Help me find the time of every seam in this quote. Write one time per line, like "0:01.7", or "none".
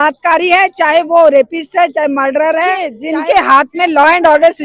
0:03.0

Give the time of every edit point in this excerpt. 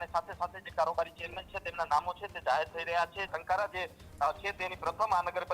0:03.4

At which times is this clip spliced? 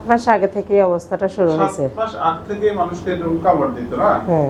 none

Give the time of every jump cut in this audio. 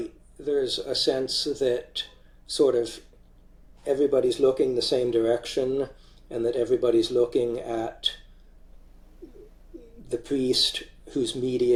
none

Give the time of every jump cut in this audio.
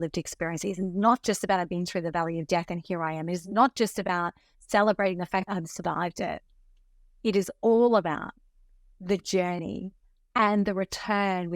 none

